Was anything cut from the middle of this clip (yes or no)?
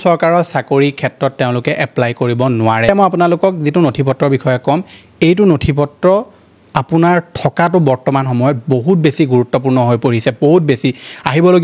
yes